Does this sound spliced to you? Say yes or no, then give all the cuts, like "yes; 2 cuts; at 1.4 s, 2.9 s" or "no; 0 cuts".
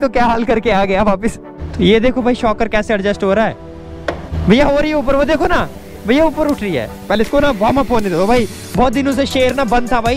yes; 3 cuts; at 1.5 s, 4.3 s, 7.0 s